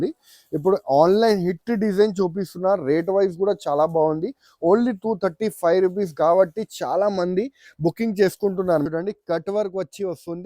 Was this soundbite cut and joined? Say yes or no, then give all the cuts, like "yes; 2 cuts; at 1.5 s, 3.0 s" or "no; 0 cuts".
yes; 1 cut; at 8.8 s